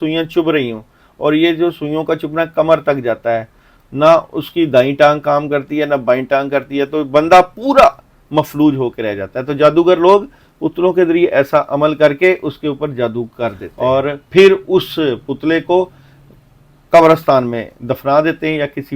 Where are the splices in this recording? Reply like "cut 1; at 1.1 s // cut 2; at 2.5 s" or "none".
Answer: cut 1; at 13.6 s